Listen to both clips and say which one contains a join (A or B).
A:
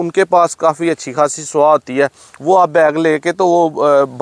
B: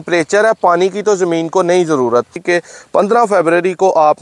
B